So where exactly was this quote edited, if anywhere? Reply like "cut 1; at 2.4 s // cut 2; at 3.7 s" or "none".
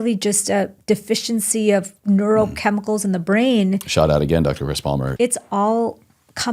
cut 1; at 5.1 s